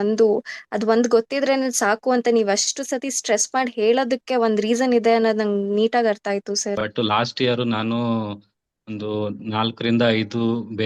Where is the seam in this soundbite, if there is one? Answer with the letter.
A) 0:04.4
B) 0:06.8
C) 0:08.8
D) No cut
B